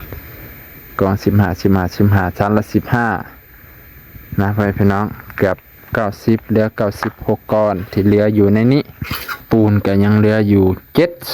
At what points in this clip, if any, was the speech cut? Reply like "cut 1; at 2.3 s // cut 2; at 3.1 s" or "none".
cut 1; at 9.4 s

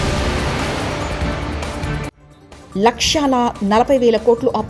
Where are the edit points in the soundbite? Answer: cut 1; at 2.1 s

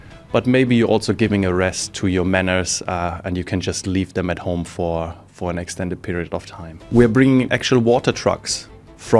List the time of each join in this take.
cut 1; at 6.9 s

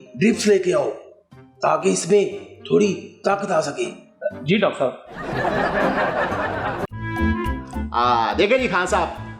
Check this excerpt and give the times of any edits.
cut 1; at 6.8 s

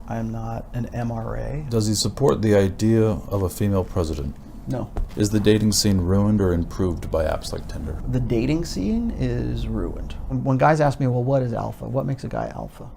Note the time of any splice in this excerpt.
cut 1; at 1.7 s // cut 2; at 5.0 s // cut 3; at 8.0 s // cut 4; at 10.3 s

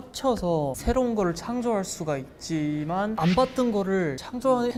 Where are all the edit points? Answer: none

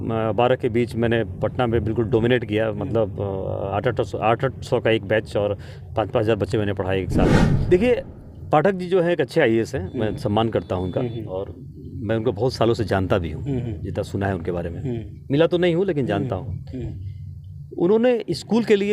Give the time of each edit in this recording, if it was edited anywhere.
cut 1; at 7.5 s

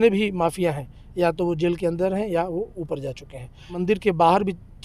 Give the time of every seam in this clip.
cut 1; at 3.7 s

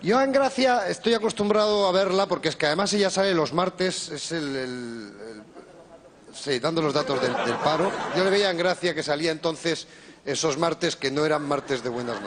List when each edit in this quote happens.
none

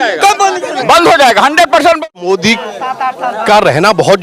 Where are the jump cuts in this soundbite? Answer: cut 1; at 2.1 s

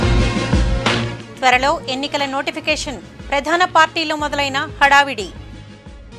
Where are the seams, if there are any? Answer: none

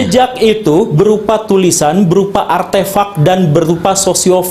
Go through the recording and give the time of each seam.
none

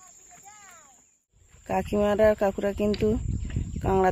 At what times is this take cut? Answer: cut 1; at 1.5 s

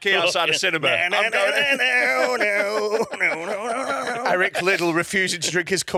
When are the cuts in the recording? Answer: none

